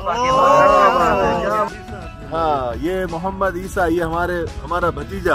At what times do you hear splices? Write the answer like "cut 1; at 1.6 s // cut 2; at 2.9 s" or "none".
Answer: cut 1; at 1.6 s

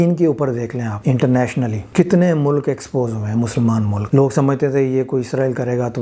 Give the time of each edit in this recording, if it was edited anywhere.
cut 1; at 0.9 s // cut 2; at 1.8 s // cut 3; at 4.0 s

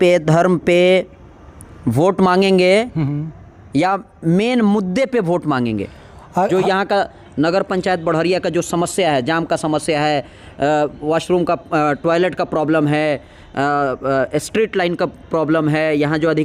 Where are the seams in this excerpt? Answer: none

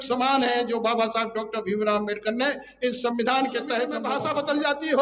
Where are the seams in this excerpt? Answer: cut 1; at 4.1 s

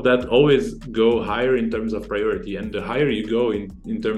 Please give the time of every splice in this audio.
none

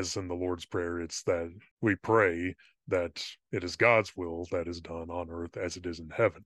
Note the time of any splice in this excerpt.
cut 1; at 1.6 s

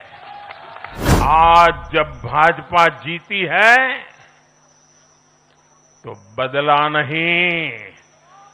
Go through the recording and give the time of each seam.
cut 1; at 1.1 s

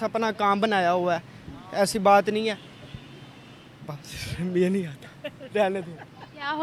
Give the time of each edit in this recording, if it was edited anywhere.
none

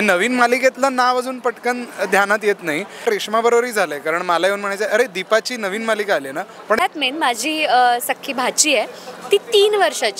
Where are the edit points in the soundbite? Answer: cut 1; at 3.0 s // cut 2; at 6.8 s

